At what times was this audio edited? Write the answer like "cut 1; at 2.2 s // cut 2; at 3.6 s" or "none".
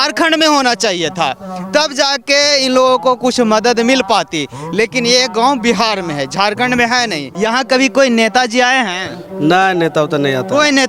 cut 1; at 7.3 s